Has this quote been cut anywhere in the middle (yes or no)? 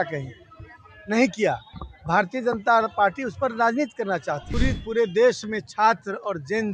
yes